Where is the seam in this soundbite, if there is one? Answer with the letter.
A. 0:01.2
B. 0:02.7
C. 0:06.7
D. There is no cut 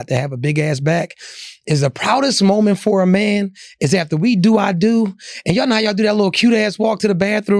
D